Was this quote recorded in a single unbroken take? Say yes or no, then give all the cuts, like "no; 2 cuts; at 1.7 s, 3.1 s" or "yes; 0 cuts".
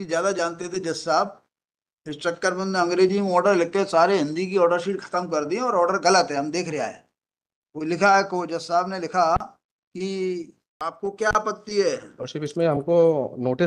no; 1 cut; at 10.6 s